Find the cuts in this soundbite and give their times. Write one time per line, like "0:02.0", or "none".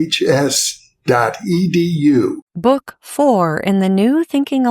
0:02.5